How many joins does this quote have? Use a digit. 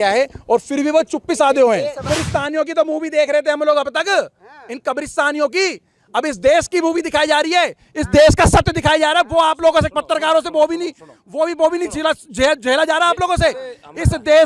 1